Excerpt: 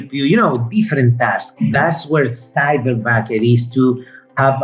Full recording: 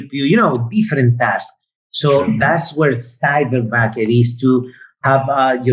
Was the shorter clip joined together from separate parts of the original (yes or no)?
yes